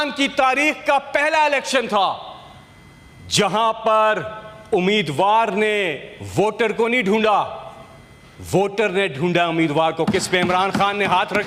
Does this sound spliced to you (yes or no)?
no